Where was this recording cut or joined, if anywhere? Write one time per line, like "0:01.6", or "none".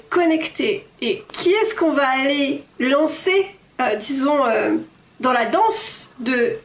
0:01.3
0:02.7